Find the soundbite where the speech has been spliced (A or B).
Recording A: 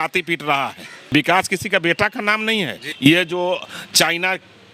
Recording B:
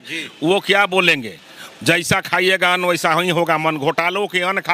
A